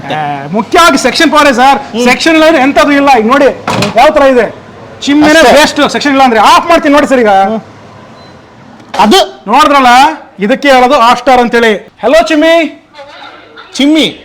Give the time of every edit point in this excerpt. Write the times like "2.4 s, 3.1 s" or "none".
11.9 s

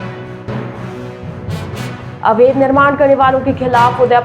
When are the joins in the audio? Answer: 1.8 s

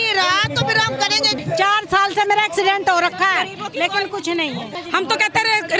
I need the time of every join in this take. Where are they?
1.4 s, 4.8 s

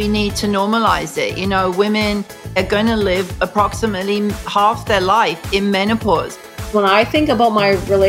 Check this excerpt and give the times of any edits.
2.6 s, 6.3 s

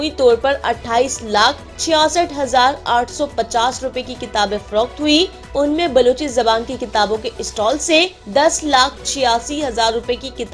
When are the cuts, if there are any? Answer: 1.7 s, 5.4 s, 8.2 s

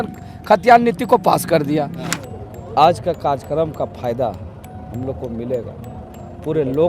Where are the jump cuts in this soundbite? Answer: 2.1 s

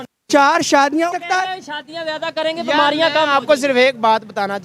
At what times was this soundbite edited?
1.1 s

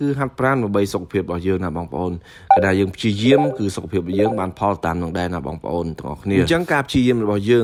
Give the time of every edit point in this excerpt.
none

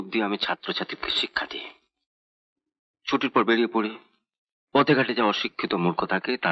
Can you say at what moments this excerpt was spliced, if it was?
none

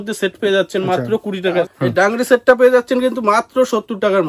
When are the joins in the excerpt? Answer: 1.6 s

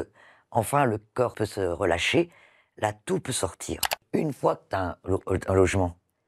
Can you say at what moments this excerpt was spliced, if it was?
1.3 s, 4.0 s

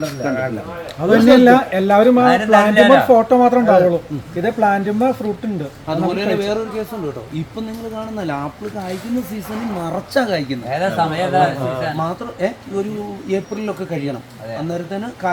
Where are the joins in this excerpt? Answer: none

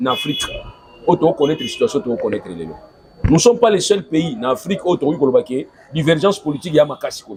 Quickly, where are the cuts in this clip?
none

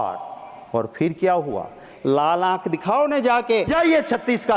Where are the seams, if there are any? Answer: 1.9 s, 3.7 s

